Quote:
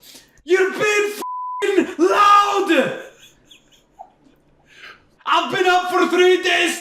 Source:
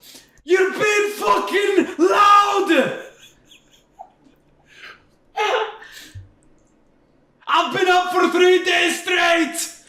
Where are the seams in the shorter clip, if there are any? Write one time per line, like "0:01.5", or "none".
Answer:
0:05.1

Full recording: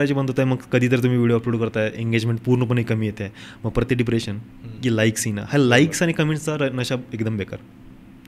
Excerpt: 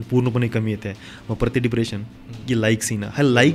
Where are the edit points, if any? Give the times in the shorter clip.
none

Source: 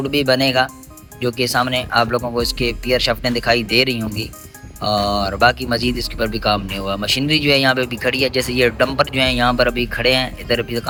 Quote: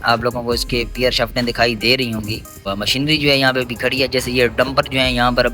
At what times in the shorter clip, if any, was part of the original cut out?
0:02.6

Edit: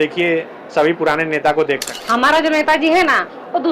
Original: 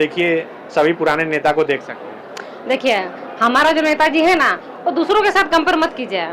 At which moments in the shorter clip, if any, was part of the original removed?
0:01.9

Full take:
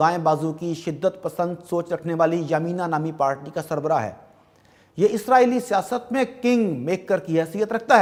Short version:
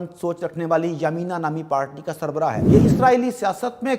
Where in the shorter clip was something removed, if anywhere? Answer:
0:02.6

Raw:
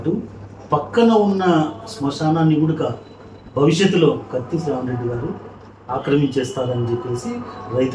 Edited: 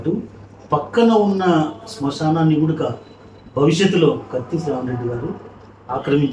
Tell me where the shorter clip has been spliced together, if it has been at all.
none

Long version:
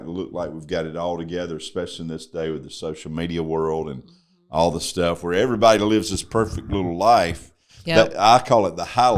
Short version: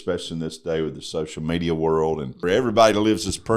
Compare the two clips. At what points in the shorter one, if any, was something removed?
0:02.4

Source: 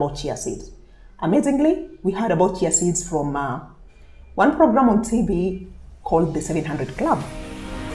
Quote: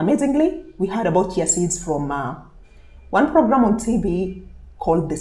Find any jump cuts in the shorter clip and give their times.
none

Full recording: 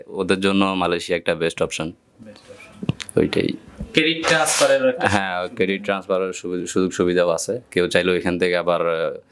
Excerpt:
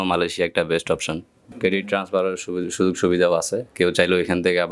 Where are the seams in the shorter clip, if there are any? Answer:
0:01.5

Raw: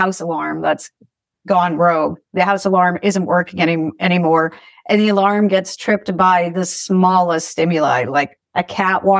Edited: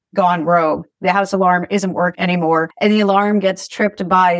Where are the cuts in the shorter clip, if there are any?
0:02.4

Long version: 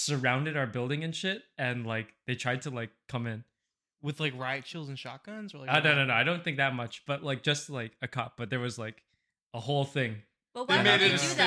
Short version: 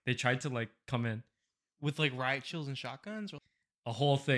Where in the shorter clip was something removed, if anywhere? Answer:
0:03.4

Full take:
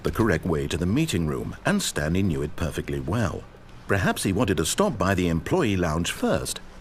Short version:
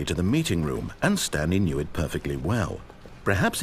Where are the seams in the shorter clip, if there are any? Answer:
none

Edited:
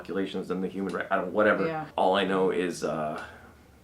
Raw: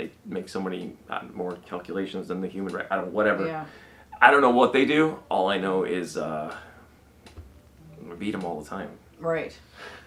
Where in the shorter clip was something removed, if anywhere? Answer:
0:01.9

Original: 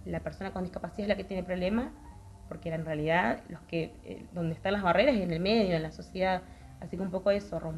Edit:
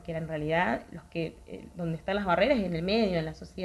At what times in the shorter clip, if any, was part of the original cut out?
none

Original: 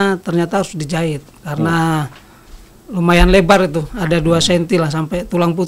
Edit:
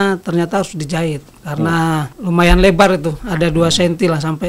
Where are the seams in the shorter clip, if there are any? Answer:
0:02.1

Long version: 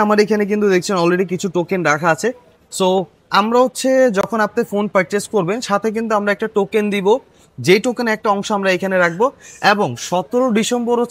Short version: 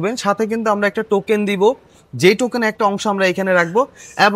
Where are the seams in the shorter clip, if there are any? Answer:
none

